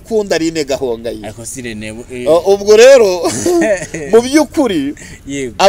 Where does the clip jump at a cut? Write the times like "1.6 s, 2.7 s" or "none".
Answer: none